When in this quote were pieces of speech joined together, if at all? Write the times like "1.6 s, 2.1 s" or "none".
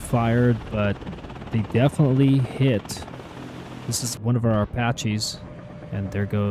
4.1 s